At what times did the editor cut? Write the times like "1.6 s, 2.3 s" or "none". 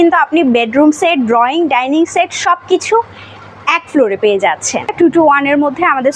4.9 s